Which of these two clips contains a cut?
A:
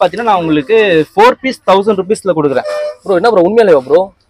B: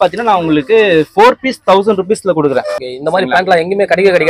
B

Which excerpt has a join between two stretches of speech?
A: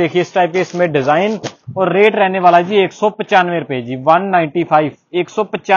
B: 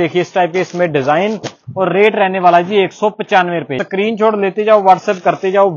B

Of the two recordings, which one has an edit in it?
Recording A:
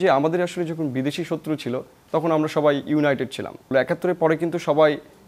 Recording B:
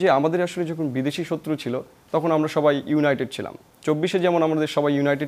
A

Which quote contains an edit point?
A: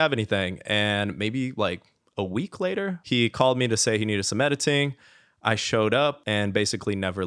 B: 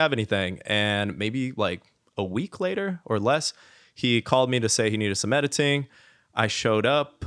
A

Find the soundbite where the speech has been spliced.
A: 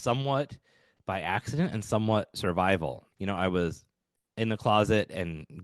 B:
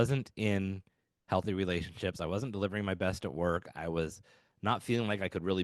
A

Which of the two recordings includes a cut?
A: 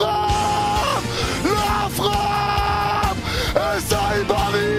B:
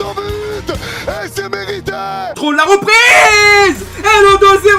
B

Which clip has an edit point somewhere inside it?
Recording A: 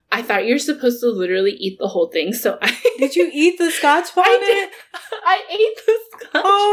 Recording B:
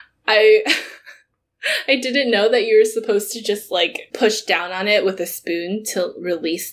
B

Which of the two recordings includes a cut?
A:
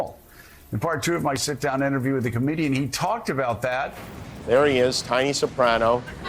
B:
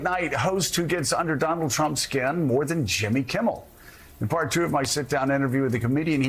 A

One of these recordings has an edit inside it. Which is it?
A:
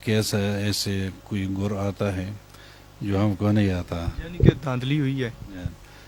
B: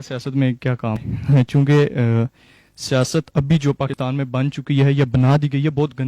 B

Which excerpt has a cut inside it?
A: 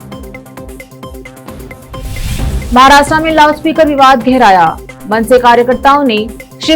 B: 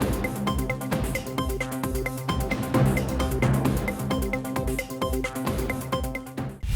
A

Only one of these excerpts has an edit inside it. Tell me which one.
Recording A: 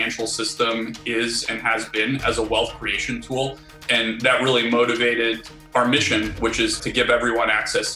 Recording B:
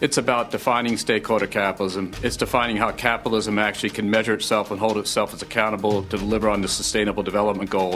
A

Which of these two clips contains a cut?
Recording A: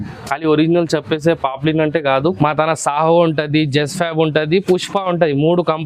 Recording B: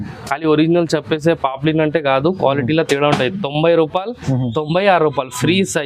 A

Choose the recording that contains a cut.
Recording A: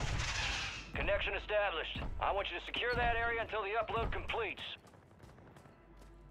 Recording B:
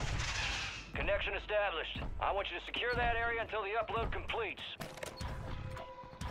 B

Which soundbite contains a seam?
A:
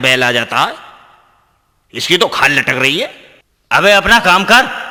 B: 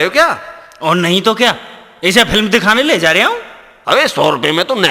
B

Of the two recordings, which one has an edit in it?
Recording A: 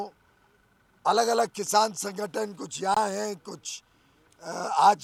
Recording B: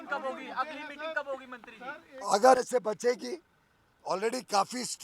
B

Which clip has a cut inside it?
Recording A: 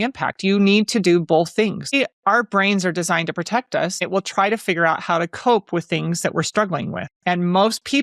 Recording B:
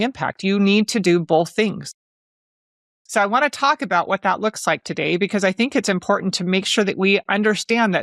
A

